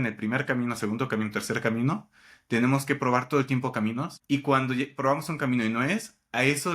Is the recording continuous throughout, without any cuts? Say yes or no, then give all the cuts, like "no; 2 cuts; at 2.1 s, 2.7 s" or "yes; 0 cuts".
no; 1 cut; at 4.1 s